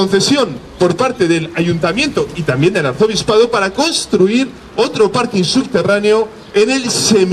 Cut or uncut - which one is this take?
uncut